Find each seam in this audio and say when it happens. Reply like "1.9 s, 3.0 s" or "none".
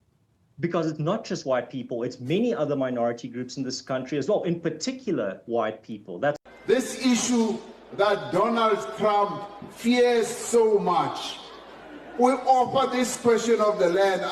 6.4 s